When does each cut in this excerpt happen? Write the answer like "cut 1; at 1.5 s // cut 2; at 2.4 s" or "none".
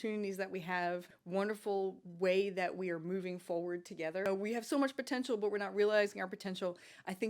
cut 1; at 1.1 s // cut 2; at 4.3 s